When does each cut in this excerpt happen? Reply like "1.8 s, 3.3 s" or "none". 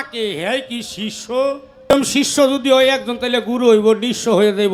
1.9 s